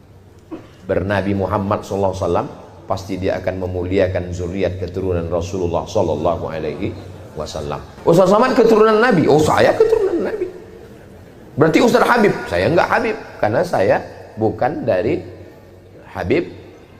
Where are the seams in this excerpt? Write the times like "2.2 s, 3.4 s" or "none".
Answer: 7.9 s

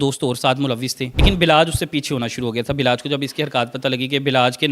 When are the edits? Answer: 1.2 s

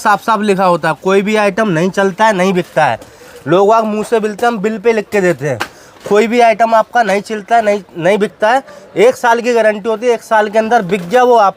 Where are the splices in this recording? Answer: none

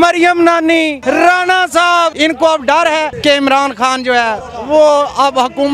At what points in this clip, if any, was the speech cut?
1.0 s, 2.1 s, 3.1 s

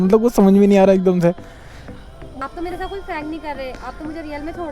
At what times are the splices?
2.4 s

